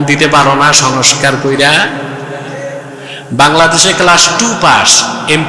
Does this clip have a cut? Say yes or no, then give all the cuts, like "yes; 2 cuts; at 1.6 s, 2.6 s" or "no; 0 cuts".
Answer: no; 0 cuts